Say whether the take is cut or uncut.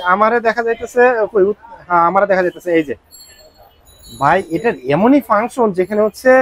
uncut